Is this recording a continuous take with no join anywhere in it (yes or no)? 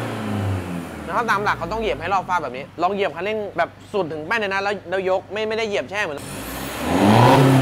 no